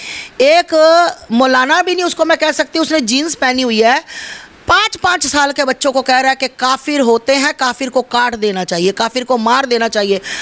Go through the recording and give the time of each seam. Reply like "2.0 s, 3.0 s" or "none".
none